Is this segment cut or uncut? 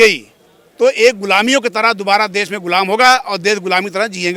uncut